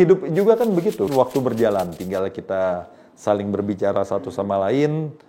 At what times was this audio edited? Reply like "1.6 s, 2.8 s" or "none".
1.1 s